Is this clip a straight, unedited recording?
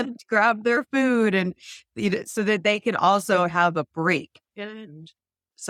yes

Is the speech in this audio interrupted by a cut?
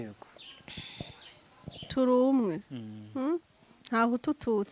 yes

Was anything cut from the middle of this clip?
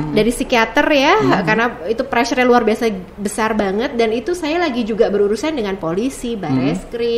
no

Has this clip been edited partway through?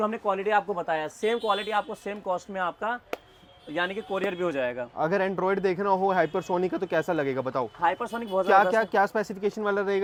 no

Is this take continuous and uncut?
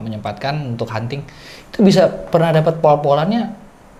yes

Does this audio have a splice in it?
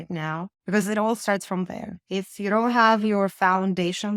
no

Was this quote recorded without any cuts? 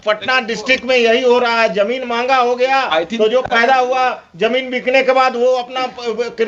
yes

